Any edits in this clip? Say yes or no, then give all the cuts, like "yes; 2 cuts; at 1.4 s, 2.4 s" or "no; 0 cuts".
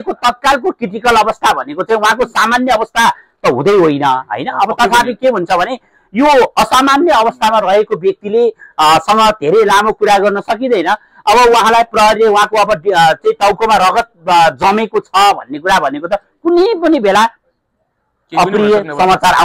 no; 0 cuts